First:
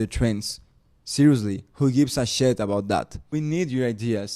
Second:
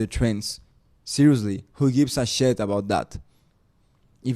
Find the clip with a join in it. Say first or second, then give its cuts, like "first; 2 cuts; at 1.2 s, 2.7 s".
first; 1 cut; at 3.3 s